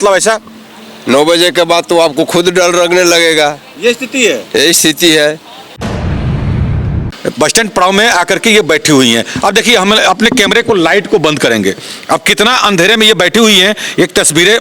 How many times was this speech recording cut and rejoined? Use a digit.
2